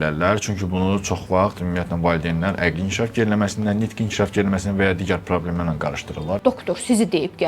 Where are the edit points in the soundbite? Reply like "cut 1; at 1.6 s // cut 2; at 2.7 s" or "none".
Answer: cut 1; at 6.4 s